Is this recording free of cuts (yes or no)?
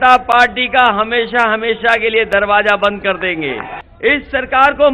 no